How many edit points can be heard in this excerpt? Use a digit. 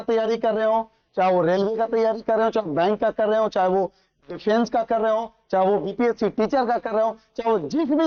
0